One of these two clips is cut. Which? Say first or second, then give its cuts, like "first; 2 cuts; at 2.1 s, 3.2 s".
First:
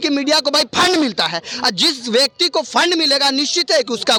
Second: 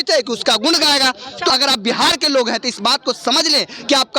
second; 1 cut; at 1.5 s